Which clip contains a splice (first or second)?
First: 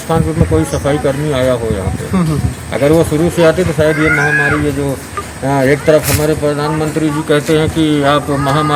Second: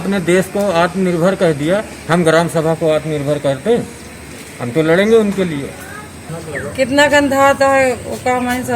second